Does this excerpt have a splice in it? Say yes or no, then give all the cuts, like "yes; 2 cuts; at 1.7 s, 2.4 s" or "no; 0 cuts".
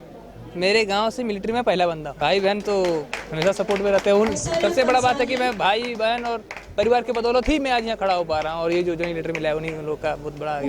yes; 1 cut; at 2.1 s